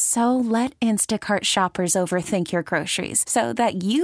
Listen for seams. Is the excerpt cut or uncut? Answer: uncut